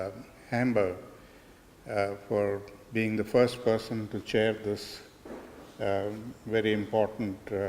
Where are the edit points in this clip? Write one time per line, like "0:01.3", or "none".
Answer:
0:03.6